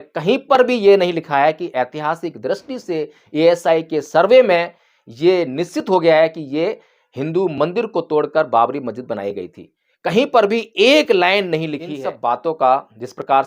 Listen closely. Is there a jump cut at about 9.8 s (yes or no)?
no